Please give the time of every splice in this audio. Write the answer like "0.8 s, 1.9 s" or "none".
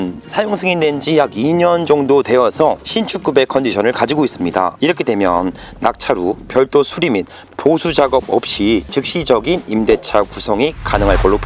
none